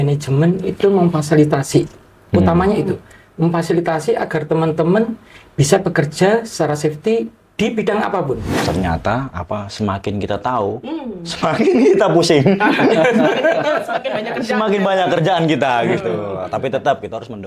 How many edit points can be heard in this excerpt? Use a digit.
1